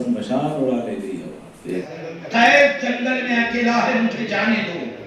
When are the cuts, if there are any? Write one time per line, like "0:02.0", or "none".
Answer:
0:01.9